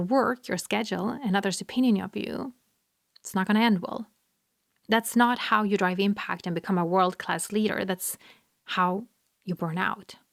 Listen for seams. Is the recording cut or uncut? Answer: uncut